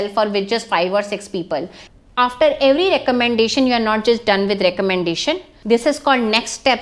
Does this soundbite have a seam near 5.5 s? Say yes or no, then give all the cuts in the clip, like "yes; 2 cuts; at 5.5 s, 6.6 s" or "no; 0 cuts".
yes; 2 cuts; at 1.8 s, 5.5 s